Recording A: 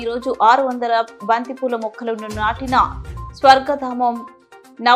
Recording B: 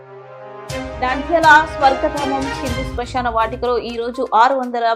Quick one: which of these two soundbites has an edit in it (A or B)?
B